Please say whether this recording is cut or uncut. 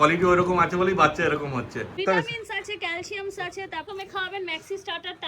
cut